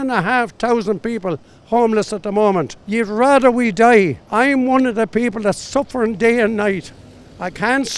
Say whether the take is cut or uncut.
cut